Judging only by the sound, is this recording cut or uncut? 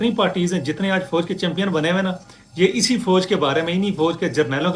uncut